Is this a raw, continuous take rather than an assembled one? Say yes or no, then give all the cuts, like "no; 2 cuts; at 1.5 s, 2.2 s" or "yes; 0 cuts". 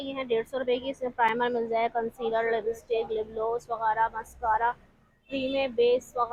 yes; 0 cuts